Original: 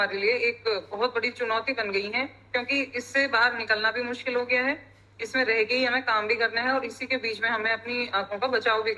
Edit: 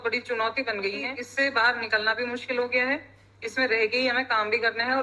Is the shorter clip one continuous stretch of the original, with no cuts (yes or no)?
no